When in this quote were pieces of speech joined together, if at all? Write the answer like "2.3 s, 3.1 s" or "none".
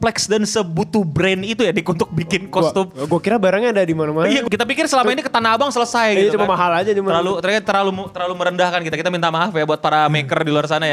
4.4 s